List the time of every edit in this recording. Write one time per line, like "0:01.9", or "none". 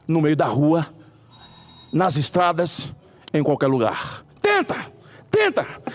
0:04.2